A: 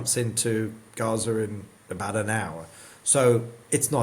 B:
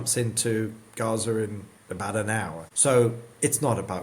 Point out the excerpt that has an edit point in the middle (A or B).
B